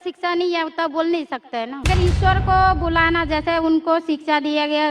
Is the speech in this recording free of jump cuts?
no; 1 cut; at 1.9 s

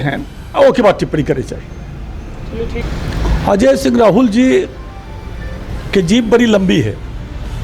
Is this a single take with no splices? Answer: no; 1 cut; at 2.8 s

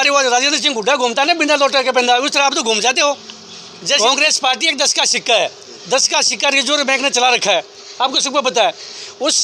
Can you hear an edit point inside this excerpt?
yes; 1 cut; at 3.8 s

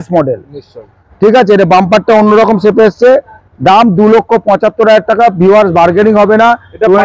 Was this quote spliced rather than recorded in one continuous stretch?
no; 0 cuts

